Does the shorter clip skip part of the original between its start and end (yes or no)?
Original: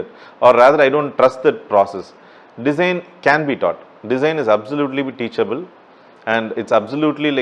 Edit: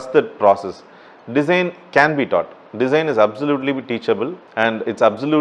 yes